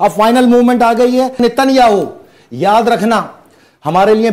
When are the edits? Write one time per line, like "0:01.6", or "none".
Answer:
0:01.4